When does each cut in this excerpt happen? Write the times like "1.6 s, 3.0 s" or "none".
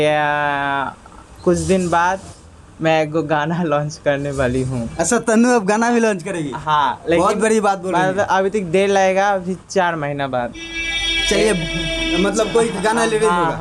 none